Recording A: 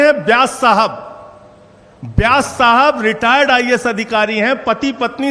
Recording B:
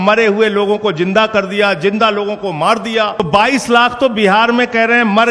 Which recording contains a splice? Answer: B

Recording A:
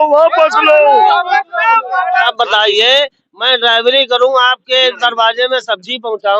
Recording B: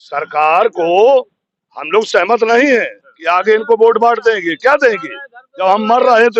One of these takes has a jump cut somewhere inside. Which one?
A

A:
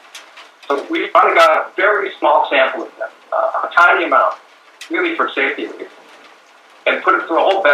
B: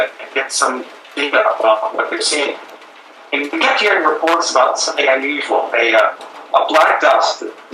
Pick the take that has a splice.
B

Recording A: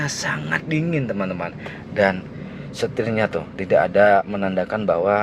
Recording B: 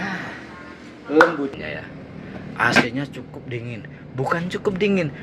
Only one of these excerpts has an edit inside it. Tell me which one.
B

